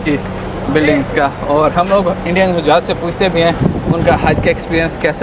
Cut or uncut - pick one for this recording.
uncut